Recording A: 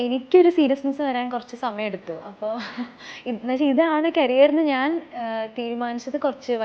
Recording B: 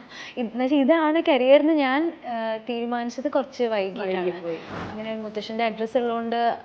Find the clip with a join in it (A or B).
B